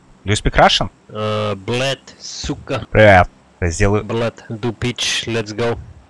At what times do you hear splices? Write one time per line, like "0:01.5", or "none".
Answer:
0:01.0
0:02.8
0:03.4
0:04.5